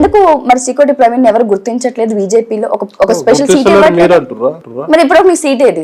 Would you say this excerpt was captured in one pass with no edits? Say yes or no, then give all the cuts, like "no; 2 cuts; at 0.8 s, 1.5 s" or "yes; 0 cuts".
no; 1 cut; at 4.7 s